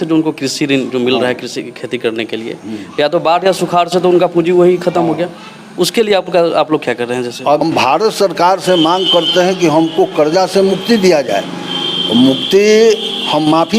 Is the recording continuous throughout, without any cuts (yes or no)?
no